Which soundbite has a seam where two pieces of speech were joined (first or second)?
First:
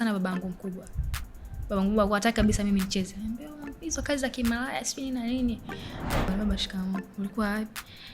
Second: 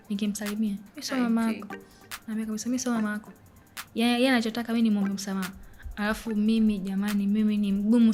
first